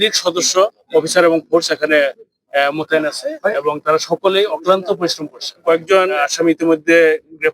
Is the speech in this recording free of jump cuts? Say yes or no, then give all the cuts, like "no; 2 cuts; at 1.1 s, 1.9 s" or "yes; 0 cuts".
no; 1 cut; at 5.6 s